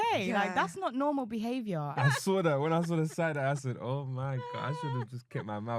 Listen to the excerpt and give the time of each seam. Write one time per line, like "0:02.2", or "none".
0:01.9